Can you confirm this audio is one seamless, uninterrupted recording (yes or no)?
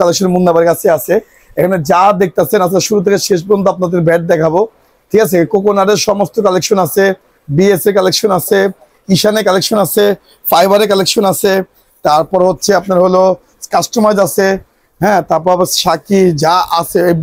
yes